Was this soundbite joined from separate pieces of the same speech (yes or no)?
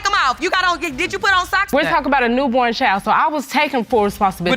yes